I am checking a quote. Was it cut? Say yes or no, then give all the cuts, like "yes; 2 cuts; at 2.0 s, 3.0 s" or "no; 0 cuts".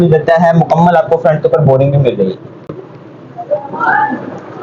no; 0 cuts